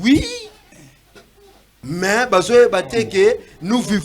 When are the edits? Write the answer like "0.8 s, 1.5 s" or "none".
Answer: 1.7 s